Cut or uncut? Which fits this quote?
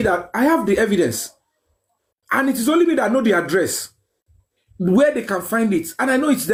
uncut